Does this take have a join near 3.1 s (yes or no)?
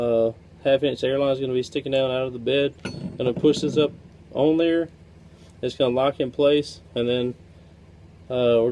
no